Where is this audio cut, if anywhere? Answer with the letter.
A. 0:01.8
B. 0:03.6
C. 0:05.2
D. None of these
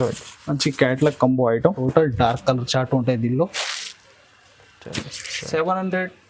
A